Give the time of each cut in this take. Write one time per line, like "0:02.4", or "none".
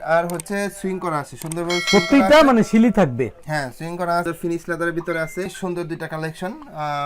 0:04.2
0:05.5